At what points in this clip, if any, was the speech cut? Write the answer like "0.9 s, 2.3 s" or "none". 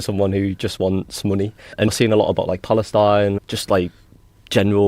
1.8 s, 3.4 s